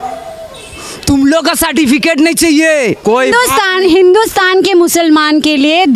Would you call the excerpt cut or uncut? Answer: uncut